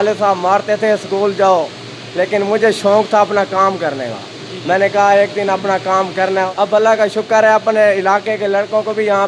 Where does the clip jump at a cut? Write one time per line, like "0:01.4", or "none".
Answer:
0:06.5